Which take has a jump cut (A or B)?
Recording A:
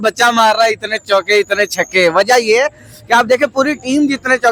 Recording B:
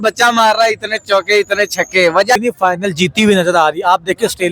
B